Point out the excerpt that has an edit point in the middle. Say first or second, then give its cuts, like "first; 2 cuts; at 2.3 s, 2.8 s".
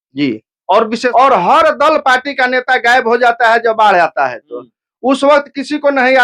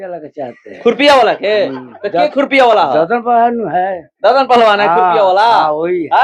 first; 1 cut; at 1.1 s